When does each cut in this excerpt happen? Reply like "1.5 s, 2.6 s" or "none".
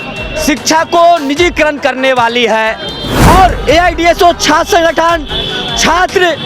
3.1 s

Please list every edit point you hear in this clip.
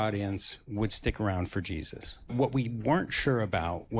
2.2 s

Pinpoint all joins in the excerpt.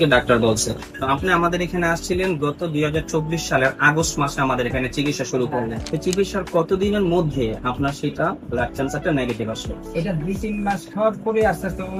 0.9 s, 5.8 s

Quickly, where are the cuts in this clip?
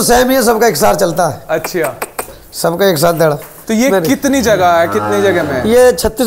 3.5 s

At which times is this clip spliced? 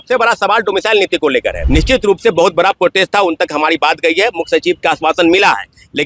1.5 s

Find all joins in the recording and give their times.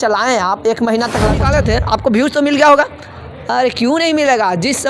1.4 s

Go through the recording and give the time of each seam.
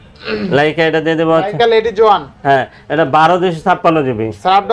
none

